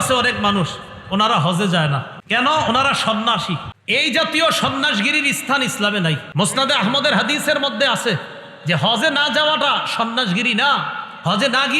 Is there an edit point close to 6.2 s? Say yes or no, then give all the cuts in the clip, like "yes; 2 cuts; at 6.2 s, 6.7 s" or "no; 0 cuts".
yes; 3 cuts; at 2.1 s, 3.7 s, 6.2 s